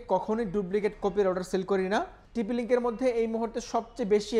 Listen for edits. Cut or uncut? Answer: cut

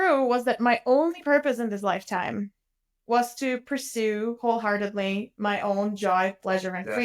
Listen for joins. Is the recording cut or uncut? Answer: uncut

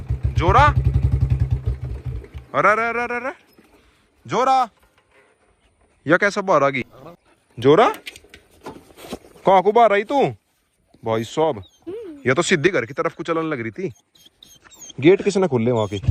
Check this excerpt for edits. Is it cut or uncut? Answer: uncut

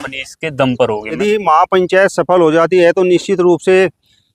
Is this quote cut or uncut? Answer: cut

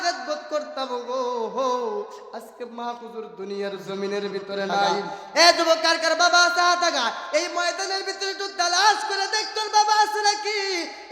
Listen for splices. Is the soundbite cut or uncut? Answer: cut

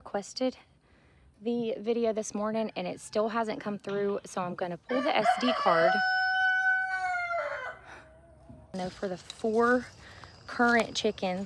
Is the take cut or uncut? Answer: cut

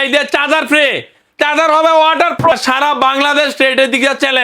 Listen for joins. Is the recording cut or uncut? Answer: cut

